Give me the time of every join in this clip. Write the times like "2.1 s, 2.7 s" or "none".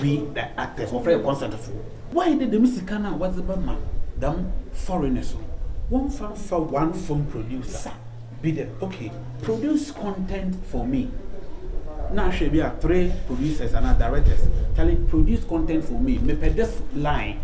2.0 s